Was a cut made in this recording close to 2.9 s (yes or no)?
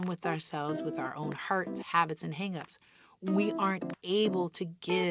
no